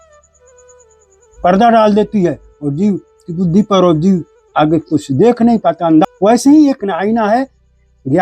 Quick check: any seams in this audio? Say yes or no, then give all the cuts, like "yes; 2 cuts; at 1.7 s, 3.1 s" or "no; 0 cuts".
yes; 1 cut; at 6.0 s